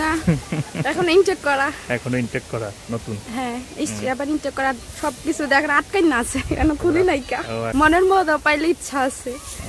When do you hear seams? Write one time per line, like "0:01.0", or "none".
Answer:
0:07.6